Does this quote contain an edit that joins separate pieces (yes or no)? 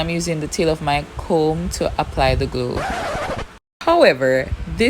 yes